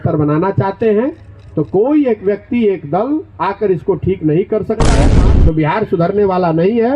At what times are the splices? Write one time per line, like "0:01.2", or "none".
0:05.1